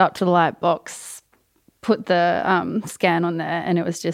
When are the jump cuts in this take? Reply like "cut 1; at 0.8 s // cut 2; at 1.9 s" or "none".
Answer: none